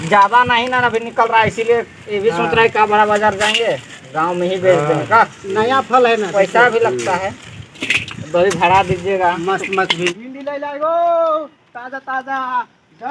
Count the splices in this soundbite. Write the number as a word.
one